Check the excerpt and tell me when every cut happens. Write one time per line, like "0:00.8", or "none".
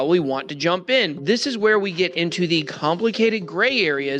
0:01.1

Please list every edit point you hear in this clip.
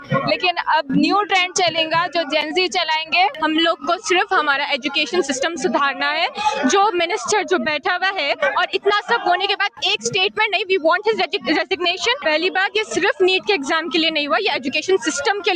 0:03.3
0:12.2

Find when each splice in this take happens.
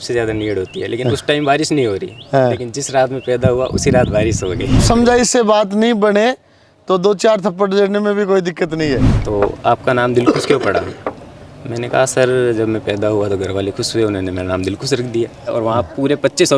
0:04.8
0:09.1
0:15.5

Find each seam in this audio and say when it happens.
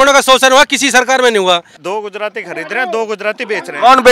0:01.8

